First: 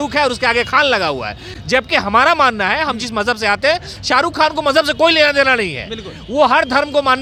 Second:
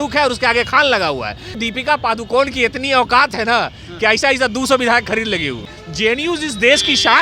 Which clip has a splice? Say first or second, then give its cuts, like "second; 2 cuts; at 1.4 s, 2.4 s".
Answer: second; 2 cuts; at 1.5 s, 5.7 s